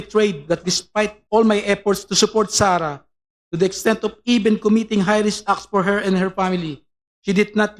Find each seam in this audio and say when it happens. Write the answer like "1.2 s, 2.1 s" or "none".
1.2 s